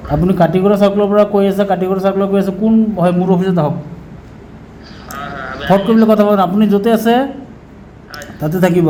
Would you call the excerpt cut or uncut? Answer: uncut